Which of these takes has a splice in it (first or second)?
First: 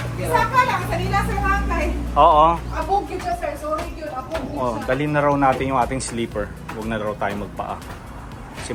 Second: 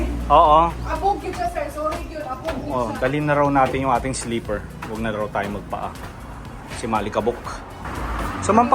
second